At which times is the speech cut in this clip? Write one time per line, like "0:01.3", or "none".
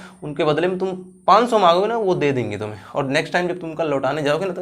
none

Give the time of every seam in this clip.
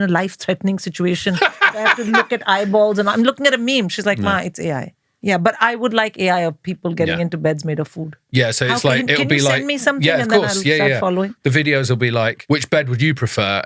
none

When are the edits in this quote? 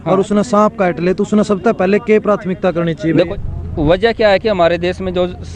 0:03.3

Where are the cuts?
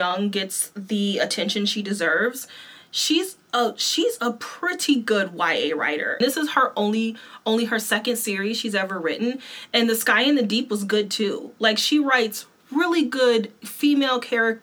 0:06.1

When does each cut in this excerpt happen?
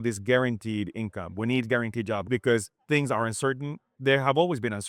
0:02.2
0:03.9

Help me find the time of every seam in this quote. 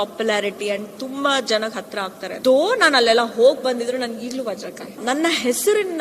0:02.3
0:05.0

